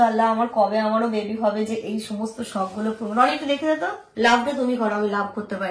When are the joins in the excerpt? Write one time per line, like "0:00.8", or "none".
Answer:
0:04.0